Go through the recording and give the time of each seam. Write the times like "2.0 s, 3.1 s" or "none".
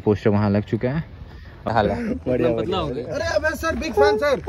1.7 s